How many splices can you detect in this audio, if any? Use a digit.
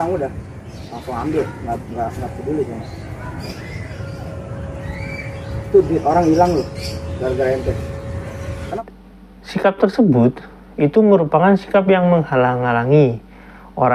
1